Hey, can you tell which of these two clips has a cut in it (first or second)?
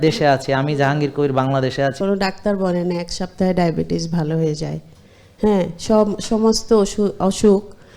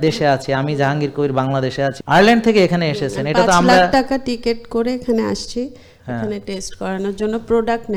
first